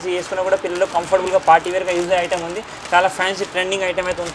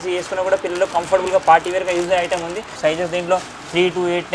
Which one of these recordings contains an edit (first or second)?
second